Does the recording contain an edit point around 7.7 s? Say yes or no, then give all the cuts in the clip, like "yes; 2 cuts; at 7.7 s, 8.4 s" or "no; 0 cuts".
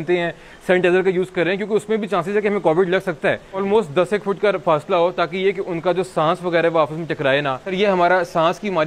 yes; 2 cuts; at 3.6 s, 7.7 s